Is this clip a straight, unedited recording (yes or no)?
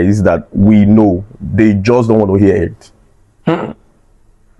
yes